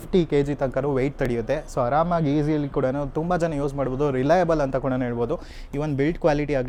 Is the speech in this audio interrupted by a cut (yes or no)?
no